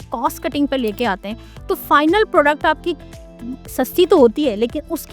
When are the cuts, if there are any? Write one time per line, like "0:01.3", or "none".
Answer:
none